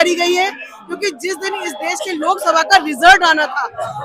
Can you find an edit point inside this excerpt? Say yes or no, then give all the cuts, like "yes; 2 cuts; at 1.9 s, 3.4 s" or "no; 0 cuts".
no; 0 cuts